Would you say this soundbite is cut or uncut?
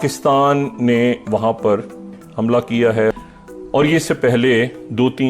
cut